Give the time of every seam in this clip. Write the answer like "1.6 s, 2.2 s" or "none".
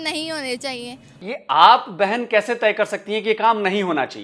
1.2 s